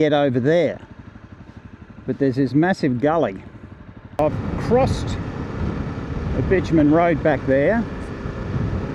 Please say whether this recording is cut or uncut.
cut